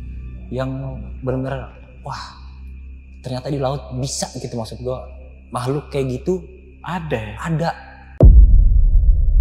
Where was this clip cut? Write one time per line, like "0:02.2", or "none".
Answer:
0:08.1